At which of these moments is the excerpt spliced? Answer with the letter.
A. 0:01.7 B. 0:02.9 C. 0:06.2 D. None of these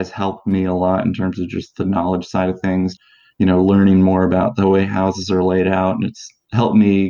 B